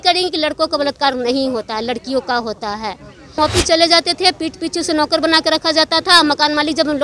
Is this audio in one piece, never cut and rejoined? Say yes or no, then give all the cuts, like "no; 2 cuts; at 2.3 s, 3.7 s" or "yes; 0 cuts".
no; 1 cut; at 3.4 s